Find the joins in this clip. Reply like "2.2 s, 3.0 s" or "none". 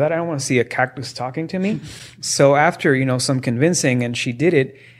none